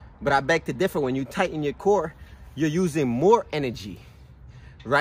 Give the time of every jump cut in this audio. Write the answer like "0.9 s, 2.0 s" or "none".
none